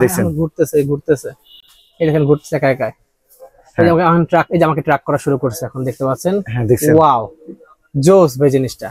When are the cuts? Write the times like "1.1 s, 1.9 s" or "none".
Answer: none